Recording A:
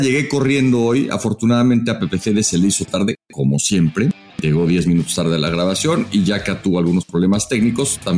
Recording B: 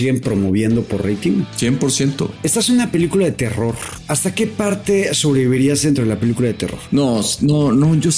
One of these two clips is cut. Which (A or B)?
B